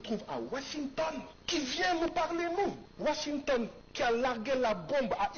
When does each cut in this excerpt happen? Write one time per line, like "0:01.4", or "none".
0:01.4
0:02.9
0:03.8